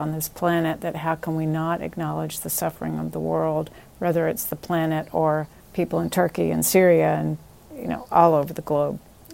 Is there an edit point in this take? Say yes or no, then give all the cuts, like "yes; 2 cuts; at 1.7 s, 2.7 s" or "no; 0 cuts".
yes; 1 cut; at 5.6 s